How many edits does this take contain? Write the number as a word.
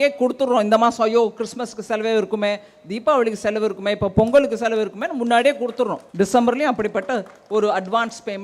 one